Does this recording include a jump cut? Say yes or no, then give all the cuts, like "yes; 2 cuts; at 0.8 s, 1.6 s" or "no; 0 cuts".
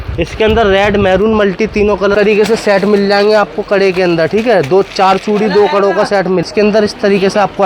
yes; 2 cuts; at 2.1 s, 6.4 s